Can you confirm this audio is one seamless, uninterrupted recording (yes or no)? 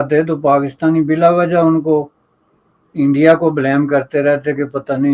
yes